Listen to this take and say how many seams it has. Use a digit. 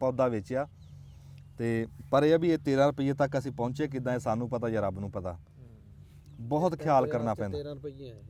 0